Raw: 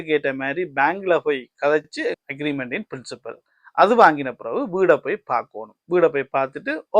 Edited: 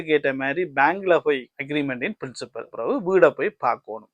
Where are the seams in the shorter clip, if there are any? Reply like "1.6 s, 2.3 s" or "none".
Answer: 1.5 s, 2.7 s